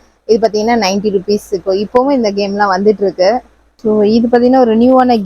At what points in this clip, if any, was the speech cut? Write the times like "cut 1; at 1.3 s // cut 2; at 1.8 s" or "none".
none